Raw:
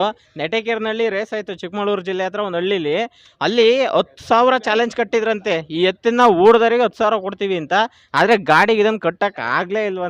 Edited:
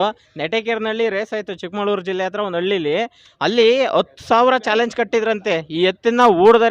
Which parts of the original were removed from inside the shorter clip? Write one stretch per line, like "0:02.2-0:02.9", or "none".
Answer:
none